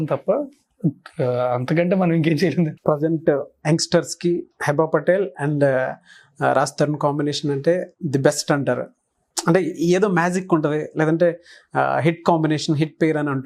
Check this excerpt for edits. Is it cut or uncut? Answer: cut